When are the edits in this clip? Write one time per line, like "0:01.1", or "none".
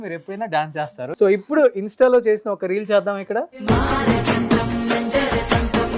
0:01.0
0:03.5